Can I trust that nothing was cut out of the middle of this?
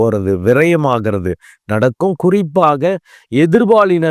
yes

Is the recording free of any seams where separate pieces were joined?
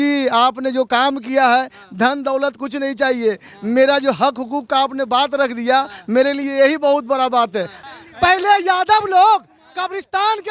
no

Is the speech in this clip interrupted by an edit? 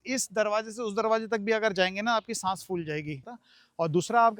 yes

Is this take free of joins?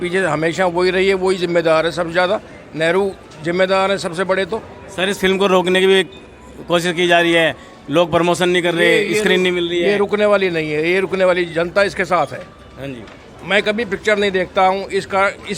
yes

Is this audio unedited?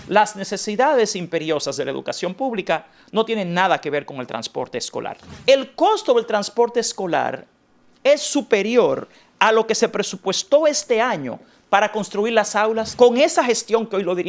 no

